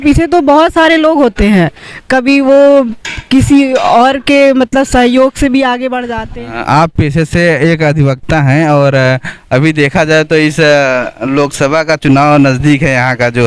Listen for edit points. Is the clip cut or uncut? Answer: cut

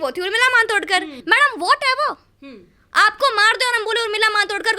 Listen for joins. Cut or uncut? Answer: cut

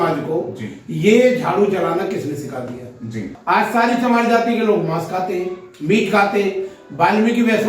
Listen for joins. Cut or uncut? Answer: cut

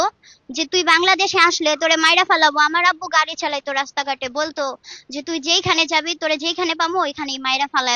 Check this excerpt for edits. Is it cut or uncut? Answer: uncut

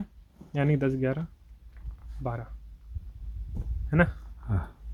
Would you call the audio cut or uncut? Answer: uncut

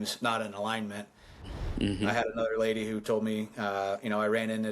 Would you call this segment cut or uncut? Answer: cut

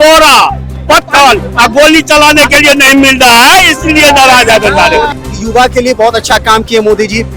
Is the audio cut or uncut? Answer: cut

